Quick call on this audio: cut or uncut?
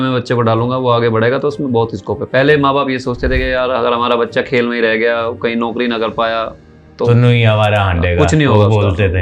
uncut